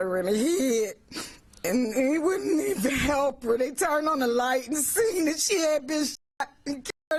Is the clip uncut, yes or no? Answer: yes